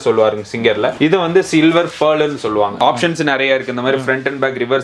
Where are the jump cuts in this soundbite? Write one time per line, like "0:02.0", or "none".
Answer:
0:00.9
0:02.7